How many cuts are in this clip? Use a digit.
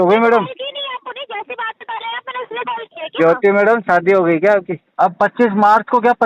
1